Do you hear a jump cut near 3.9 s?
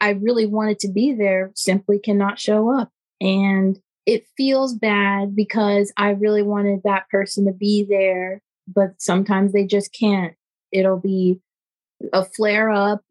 yes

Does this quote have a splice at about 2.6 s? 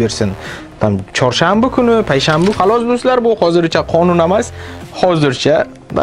yes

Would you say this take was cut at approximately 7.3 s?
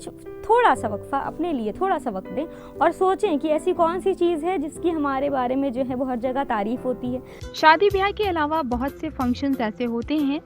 yes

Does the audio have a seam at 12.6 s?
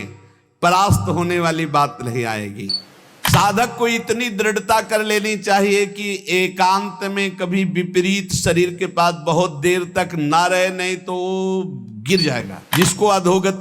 yes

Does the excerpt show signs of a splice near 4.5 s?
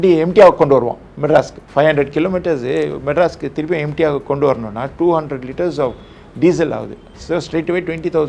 no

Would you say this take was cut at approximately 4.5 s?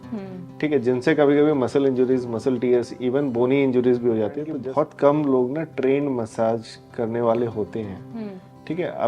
yes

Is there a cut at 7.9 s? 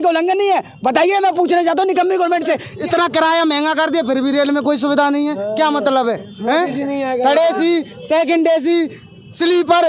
no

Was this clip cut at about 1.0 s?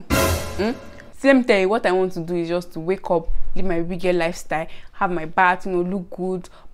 no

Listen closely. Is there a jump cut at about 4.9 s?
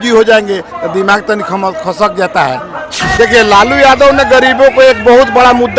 no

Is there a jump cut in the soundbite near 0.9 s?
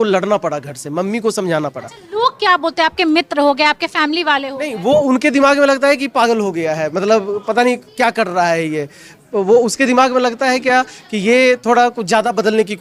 no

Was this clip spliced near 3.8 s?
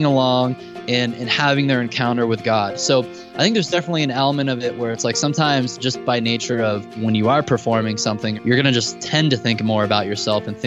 no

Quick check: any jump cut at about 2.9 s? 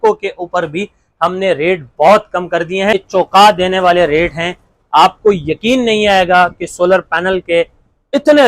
yes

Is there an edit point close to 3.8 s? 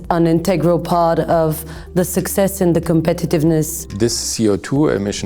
yes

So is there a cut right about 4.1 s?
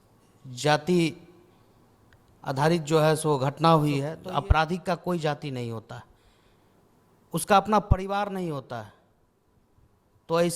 yes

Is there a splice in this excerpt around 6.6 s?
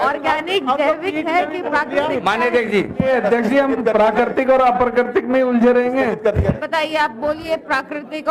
yes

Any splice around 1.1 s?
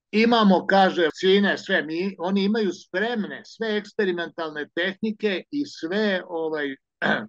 yes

